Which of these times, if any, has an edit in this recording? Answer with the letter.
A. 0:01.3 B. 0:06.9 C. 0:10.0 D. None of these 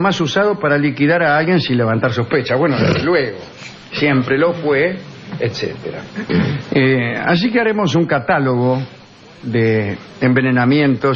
B